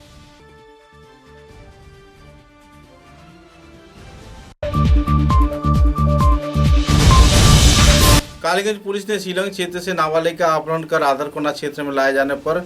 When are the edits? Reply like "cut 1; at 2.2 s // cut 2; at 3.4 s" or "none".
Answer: cut 1; at 4.5 s // cut 2; at 8.2 s